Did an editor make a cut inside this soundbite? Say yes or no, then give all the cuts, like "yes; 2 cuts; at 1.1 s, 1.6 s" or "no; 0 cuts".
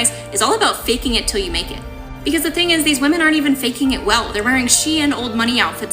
yes; 1 cut; at 1.9 s